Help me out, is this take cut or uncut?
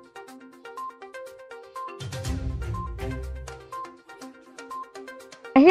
cut